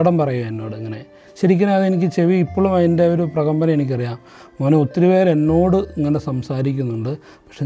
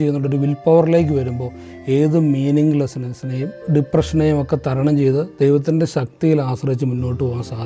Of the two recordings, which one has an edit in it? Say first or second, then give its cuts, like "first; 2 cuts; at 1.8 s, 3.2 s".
second; 1 cut; at 3.7 s